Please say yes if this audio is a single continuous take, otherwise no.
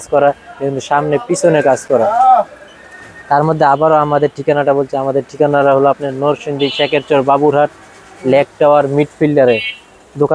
yes